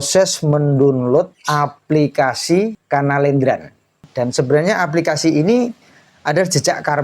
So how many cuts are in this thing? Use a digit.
3